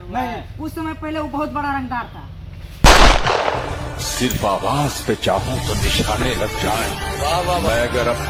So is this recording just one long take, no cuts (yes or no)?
yes